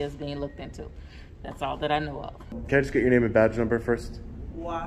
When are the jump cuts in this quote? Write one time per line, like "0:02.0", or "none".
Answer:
0:02.6